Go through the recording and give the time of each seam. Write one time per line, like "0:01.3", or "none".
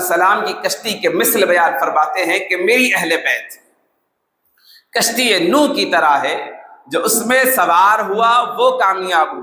none

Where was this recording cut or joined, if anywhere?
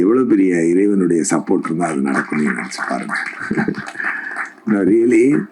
none

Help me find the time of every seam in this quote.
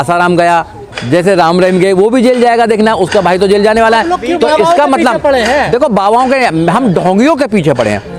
none

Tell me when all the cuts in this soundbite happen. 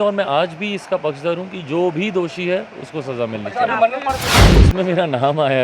0:04.3

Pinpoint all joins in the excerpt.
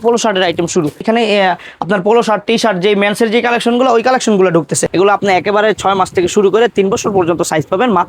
0:01.0
0:04.8

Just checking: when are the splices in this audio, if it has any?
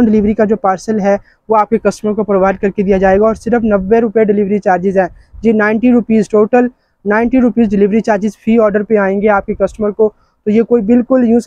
none

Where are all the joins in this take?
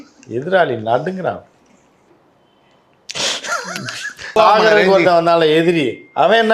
0:02.1
0:04.4

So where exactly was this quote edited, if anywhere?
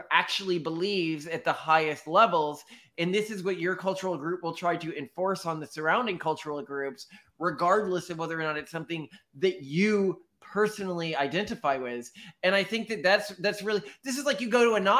none

